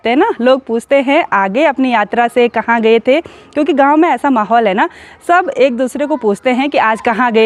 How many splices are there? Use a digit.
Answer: 0